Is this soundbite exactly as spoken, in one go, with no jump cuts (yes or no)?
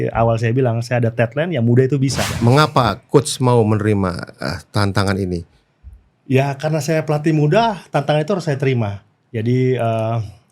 no